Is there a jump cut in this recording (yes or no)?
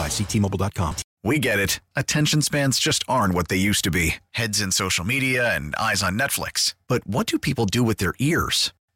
yes